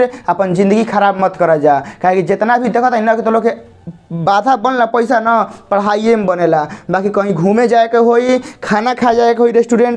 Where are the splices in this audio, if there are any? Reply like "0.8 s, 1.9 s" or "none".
none